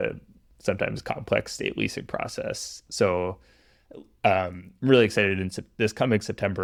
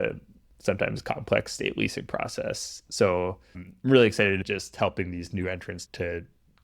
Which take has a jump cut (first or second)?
second